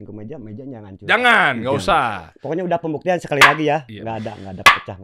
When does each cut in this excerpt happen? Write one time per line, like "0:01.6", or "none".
none